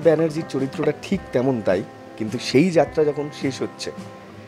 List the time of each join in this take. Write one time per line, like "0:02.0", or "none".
none